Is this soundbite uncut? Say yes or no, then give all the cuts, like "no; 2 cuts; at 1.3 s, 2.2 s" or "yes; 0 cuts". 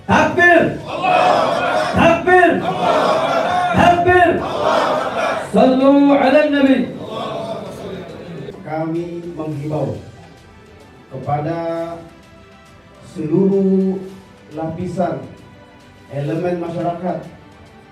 no; 1 cut; at 8.6 s